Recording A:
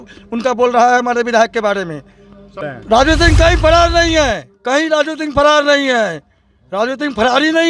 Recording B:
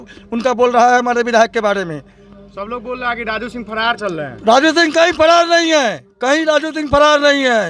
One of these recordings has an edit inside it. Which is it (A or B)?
A